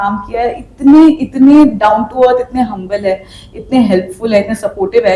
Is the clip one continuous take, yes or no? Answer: yes